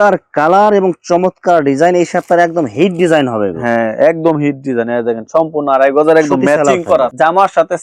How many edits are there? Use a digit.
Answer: 0